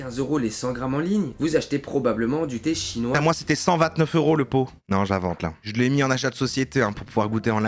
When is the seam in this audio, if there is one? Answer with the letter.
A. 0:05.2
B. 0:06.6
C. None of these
A